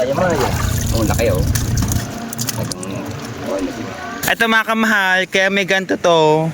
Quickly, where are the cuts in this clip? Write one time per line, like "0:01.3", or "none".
0:04.2